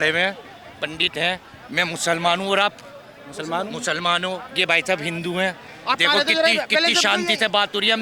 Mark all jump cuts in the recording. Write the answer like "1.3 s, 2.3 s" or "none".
none